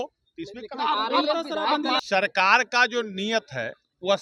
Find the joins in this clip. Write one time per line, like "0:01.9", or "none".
0:02.0

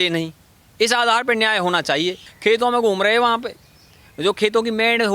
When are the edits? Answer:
0:02.3

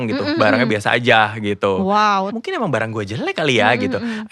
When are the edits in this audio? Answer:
0:02.3

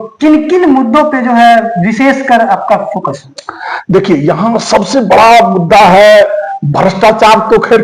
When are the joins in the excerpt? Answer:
none

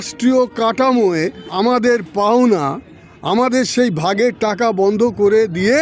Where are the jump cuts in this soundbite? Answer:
0:01.4

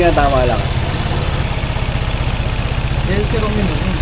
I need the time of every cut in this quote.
0:01.4

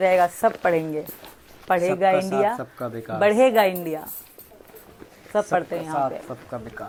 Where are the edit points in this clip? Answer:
none

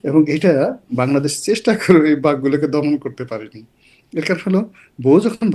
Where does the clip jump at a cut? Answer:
none

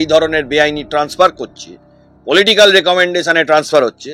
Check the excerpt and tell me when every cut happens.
none

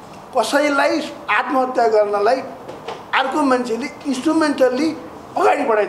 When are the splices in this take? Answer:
none

